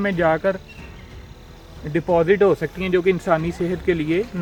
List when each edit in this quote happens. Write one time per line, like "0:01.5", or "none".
none